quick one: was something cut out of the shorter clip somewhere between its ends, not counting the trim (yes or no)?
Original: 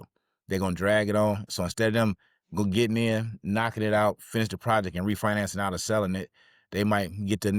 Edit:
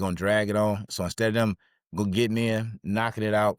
no